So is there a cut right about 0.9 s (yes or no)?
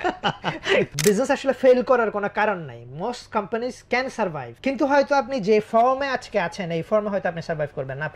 yes